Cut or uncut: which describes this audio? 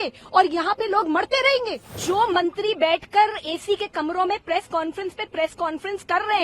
cut